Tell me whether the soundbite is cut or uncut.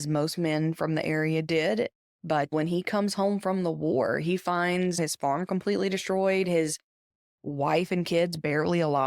cut